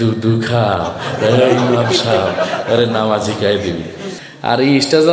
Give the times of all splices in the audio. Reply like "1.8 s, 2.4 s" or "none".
4.1 s